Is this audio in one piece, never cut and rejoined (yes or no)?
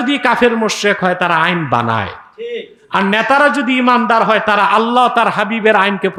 yes